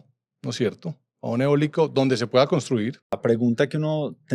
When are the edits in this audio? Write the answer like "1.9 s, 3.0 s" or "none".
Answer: 3.2 s